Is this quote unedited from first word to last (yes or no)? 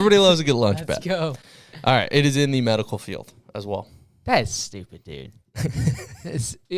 yes